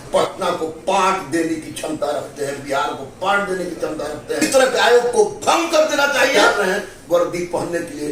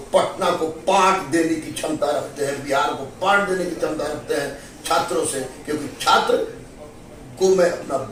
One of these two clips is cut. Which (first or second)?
first